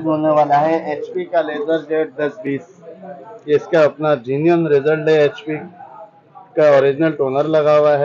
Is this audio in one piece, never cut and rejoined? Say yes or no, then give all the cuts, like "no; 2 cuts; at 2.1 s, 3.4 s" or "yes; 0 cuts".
yes; 0 cuts